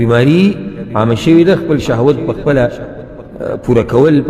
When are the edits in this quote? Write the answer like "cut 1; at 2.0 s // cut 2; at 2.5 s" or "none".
none